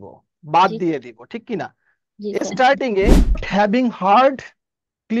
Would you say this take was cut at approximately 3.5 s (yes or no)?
yes